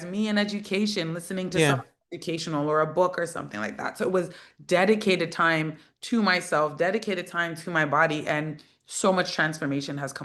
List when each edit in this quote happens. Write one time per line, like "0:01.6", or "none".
none